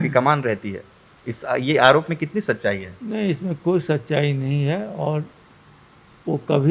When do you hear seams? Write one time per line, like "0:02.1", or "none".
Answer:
none